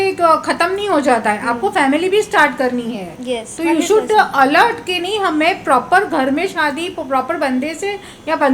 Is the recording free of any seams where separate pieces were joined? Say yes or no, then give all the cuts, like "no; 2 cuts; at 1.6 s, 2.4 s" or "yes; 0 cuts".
yes; 0 cuts